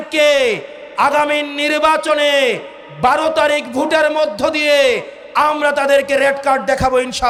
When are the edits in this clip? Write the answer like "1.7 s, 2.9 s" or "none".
none